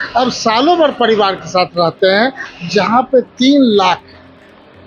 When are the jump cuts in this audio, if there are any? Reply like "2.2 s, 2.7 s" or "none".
2.4 s